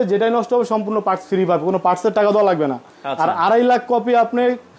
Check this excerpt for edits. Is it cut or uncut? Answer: uncut